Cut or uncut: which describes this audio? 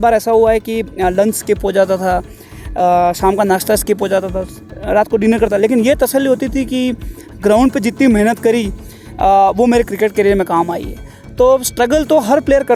uncut